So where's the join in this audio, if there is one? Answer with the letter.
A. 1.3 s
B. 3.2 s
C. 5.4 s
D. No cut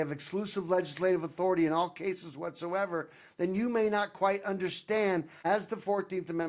C